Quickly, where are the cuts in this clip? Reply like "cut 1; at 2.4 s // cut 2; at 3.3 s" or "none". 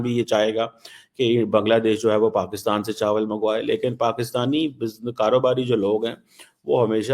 none